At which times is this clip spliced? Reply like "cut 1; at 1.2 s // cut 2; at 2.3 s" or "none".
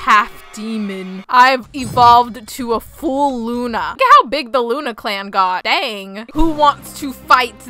cut 1; at 3.9 s // cut 2; at 6.2 s